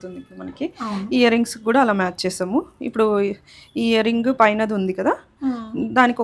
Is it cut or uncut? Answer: uncut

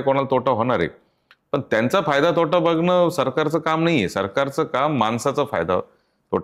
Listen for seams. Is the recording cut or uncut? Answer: uncut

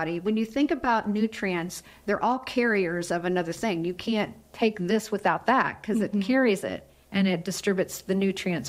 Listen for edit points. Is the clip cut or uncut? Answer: uncut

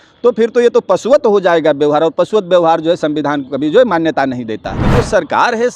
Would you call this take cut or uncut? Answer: cut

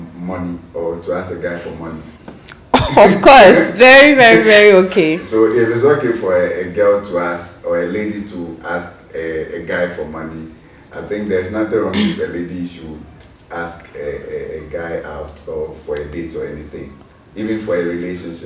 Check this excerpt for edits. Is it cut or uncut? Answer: uncut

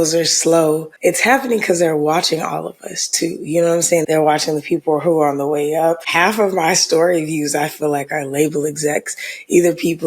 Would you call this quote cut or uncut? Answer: cut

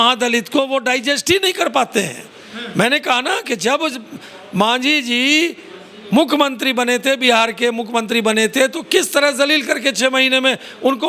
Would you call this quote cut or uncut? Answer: uncut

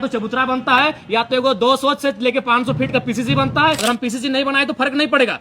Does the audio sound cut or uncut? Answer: cut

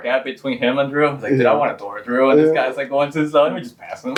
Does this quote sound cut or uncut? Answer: uncut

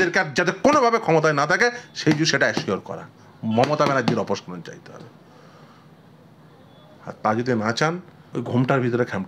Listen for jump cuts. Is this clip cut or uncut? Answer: cut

